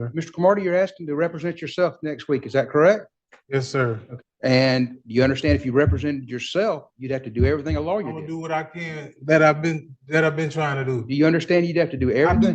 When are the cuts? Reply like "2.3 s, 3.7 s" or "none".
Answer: 4.1 s